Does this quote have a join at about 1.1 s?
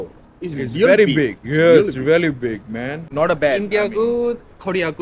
no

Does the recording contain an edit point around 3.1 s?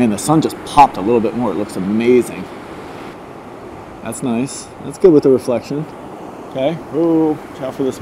yes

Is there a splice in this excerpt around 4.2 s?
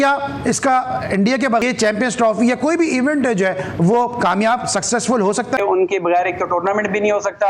no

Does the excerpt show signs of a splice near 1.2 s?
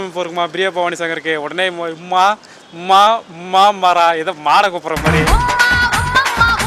no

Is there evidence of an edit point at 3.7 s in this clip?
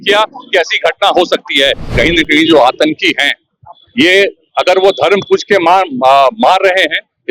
no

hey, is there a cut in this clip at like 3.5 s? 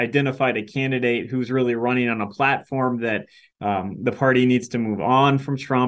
no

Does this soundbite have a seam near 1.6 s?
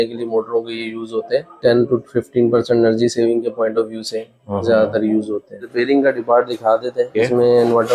yes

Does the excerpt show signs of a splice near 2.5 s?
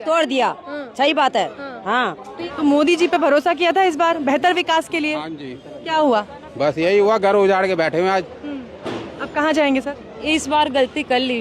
yes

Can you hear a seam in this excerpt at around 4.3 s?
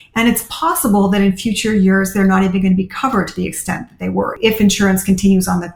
yes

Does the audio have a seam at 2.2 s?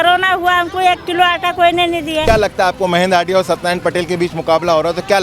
yes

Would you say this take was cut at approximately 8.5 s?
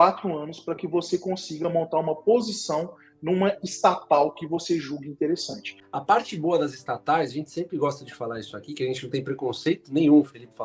no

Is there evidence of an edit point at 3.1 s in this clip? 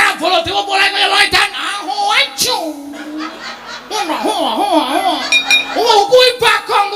no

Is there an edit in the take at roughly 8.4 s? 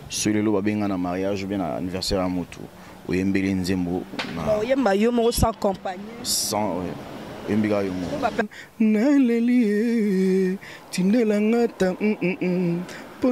yes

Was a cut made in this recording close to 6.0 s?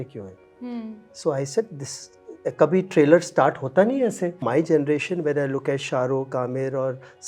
no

